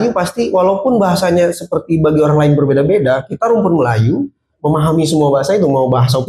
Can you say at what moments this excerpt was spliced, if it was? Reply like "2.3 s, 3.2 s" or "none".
none